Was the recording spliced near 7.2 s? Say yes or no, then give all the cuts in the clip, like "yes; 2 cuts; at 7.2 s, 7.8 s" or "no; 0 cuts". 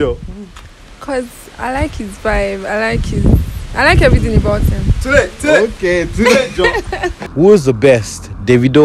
yes; 1 cut; at 7.2 s